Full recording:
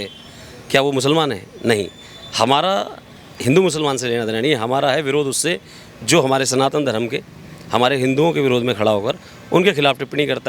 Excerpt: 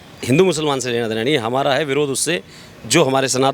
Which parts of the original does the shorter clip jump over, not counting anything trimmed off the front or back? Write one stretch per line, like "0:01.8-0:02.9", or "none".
none